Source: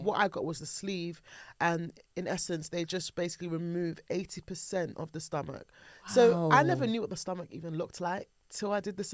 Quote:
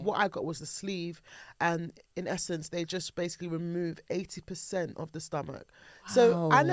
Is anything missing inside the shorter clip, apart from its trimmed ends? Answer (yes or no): no